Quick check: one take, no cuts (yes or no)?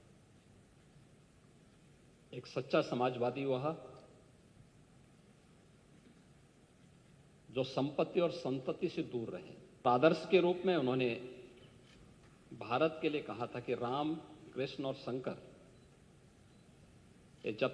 no